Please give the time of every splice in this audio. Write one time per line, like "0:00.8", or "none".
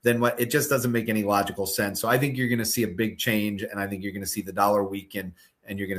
none